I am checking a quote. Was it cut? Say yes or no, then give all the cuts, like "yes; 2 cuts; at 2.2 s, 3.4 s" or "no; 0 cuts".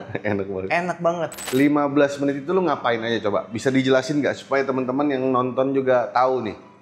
yes; 1 cut; at 1.4 s